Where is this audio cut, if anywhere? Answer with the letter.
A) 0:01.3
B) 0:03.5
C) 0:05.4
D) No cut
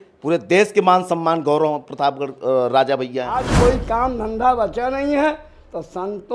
B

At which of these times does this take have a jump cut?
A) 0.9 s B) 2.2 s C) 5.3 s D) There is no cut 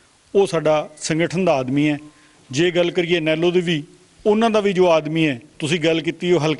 D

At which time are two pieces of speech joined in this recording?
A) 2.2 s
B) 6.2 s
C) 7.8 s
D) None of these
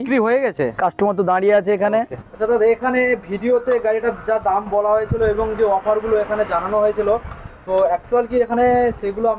A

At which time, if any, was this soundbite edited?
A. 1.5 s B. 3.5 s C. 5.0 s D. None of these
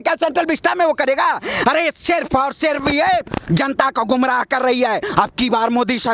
C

